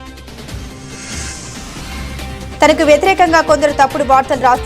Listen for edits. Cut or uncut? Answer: uncut